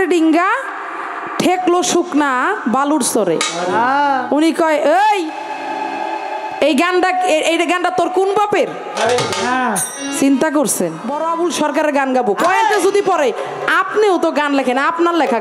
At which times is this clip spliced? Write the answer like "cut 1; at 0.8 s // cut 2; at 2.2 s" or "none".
cut 1; at 11.1 s